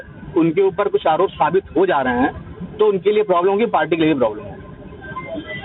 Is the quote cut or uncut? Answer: uncut